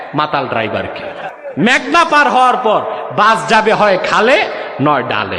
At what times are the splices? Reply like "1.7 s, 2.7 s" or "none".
1.3 s